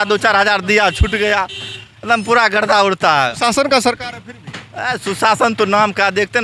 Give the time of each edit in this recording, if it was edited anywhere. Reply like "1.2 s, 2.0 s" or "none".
none